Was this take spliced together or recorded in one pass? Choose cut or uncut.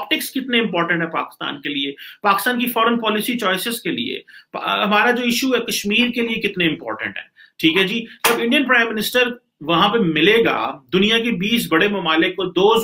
uncut